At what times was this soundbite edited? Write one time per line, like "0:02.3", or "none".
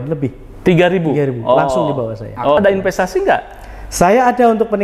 0:02.6